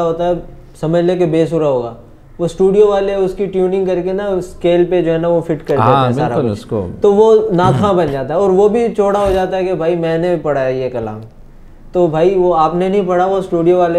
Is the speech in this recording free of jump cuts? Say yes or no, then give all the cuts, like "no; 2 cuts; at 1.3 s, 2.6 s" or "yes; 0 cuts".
yes; 0 cuts